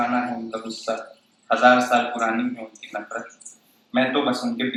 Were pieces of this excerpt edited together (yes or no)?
no